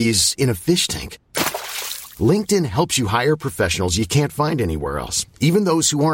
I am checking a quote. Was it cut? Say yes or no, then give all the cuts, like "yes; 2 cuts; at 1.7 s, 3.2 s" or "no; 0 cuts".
no; 0 cuts